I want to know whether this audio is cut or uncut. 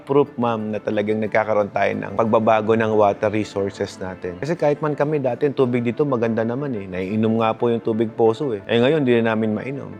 uncut